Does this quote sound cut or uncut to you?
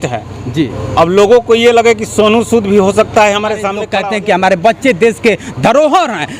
cut